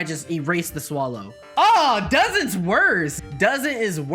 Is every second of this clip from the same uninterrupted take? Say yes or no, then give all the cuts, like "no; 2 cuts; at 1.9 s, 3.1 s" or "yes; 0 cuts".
no; 2 cuts; at 1.3 s, 3.2 s